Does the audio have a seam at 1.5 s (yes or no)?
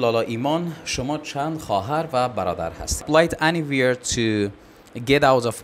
no